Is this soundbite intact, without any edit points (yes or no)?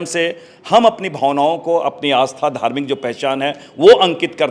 yes